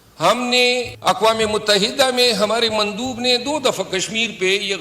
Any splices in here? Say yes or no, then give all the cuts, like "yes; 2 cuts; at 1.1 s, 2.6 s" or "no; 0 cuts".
yes; 1 cut; at 0.9 s